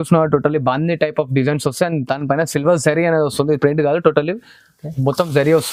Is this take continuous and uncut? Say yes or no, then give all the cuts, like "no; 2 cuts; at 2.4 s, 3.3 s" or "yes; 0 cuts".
yes; 0 cuts